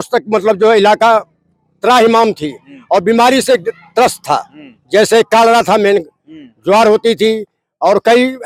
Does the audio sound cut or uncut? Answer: uncut